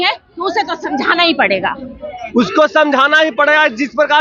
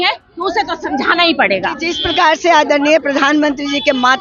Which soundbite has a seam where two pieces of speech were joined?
second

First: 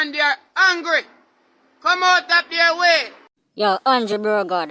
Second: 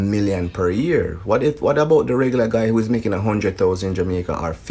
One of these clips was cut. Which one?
first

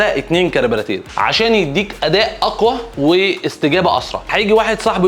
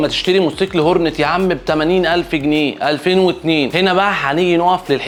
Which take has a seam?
first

